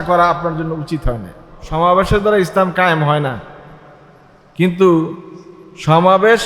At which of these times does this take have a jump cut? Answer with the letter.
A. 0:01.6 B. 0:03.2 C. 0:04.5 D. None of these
A